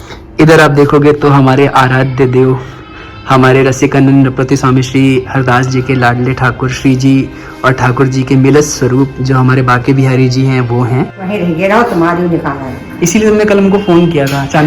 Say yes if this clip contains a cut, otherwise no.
yes